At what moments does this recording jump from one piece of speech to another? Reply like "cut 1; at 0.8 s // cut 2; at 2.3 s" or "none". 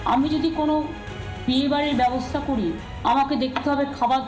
cut 1; at 2.9 s